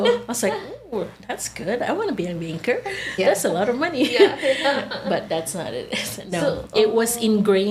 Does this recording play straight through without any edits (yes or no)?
yes